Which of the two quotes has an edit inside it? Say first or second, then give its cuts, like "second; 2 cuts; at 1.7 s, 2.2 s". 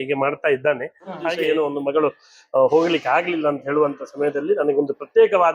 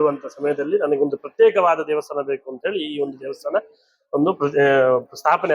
first; 1 cut; at 1.4 s